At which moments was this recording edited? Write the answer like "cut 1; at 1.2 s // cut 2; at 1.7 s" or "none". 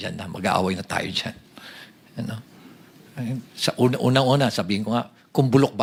none